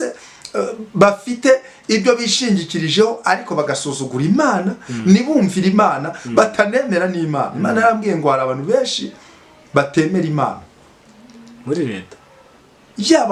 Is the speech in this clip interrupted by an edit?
no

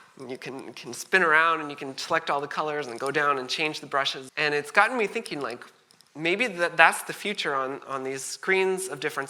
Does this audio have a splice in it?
yes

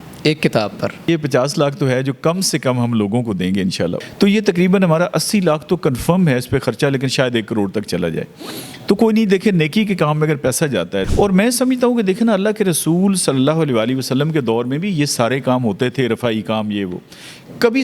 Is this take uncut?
no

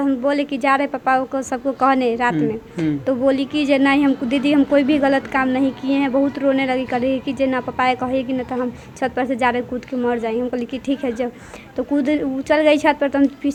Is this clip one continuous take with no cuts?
yes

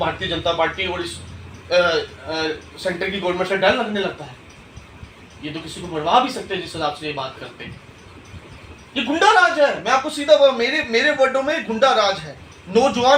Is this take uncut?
yes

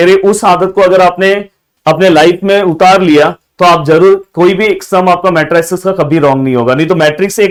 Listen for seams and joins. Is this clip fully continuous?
yes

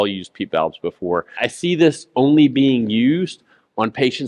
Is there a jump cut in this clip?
yes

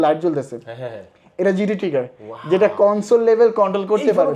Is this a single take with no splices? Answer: yes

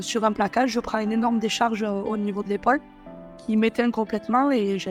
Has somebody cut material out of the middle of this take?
no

